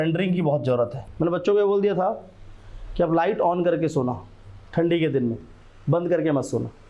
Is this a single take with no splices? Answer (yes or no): no